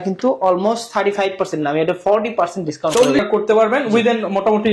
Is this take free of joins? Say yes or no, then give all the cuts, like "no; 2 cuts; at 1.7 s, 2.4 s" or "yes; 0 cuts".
no; 1 cut; at 3.3 s